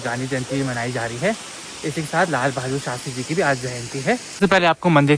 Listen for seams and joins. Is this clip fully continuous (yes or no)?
yes